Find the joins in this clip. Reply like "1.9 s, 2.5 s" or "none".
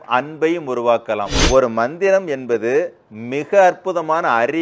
1.4 s